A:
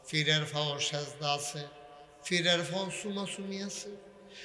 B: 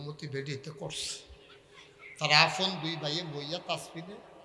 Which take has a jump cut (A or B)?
B